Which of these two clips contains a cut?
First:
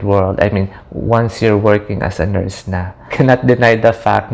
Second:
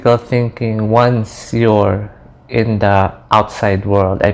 first; 1 cut; at 3.1 s

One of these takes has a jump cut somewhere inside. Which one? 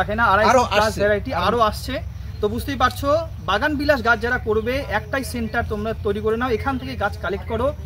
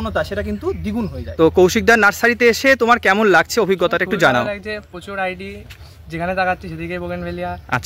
second; 1 cut; at 1.2 s

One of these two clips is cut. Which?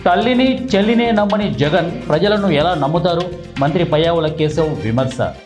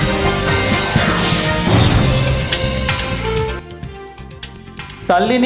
second; 1 cut; at 3.7 s

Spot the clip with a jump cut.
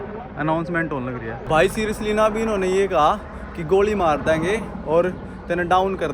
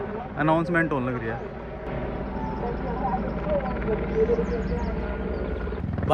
first; 1 cut; at 1.4 s

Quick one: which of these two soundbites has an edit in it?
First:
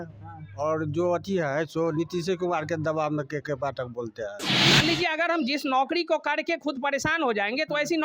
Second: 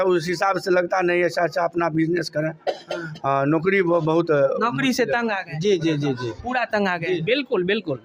first; 1 cut; at 4.6 s

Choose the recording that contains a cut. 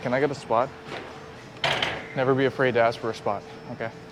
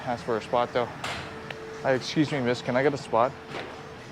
second; 1 cut; at 1.4 s

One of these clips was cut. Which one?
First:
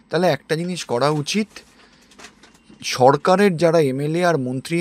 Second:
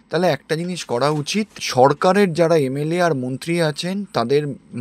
second; 1 cut; at 1.6 s

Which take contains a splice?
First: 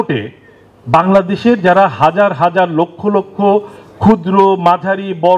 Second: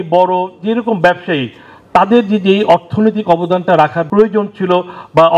second; 1 cut; at 4.0 s

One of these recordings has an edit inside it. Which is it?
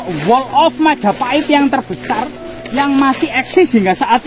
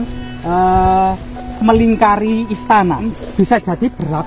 second; 1 cut; at 3.1 s

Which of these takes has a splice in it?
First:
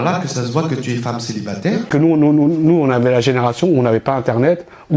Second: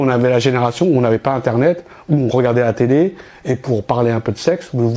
first; 1 cut; at 1.9 s

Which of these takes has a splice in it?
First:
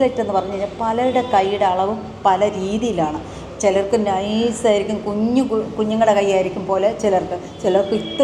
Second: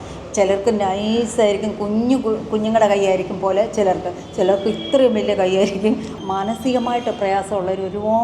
second; 1 cut; at 6.1 s

